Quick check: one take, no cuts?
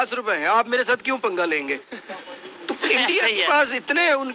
yes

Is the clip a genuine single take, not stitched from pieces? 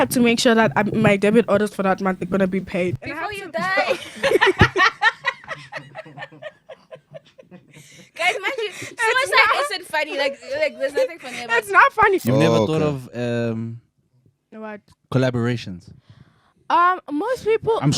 no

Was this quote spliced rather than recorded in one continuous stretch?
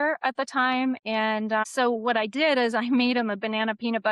no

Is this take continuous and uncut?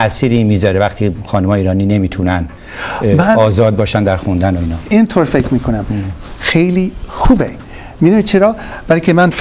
yes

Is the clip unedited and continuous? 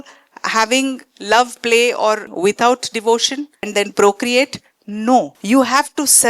no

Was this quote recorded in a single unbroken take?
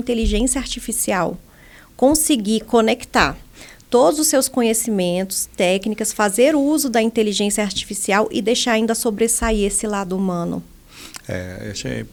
yes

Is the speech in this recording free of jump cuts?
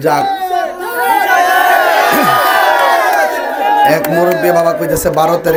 yes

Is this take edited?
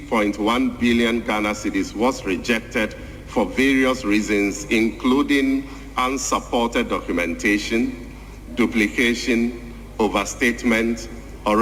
no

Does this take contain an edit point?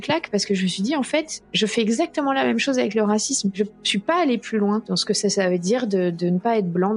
yes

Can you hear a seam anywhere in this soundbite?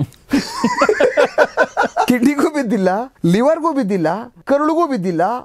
yes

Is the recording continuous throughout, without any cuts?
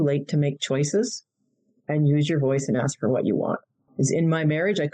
no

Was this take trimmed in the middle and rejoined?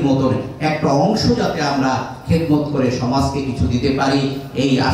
no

